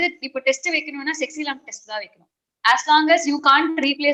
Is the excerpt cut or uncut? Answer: uncut